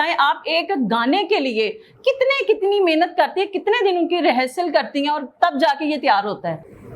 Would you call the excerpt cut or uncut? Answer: uncut